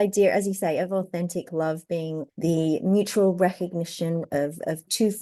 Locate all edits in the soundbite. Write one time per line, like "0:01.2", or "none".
0:02.3